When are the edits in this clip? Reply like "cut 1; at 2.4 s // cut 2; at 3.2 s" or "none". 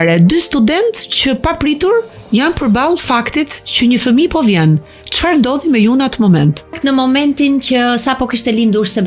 cut 1; at 6.7 s